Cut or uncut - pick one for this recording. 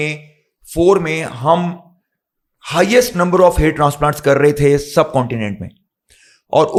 uncut